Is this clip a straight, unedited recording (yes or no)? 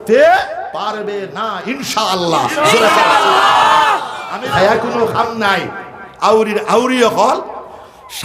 no